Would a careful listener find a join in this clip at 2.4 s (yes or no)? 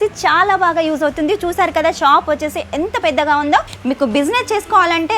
no